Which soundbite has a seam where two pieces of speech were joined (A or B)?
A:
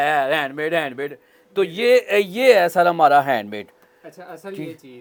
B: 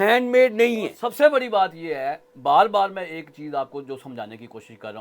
B